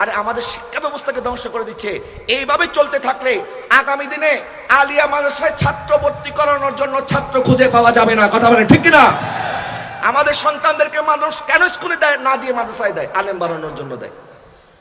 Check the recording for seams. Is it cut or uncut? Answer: uncut